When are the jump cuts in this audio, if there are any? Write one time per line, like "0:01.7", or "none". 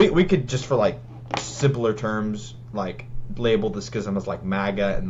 none